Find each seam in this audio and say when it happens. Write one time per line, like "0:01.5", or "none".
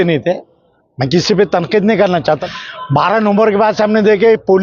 0:02.4